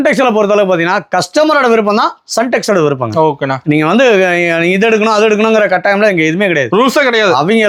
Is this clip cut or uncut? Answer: uncut